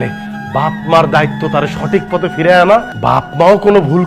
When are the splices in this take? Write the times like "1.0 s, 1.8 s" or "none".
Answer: 2.9 s